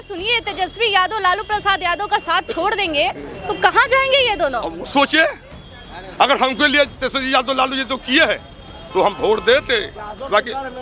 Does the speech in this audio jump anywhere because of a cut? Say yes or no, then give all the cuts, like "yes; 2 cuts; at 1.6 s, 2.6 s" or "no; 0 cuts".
no; 0 cuts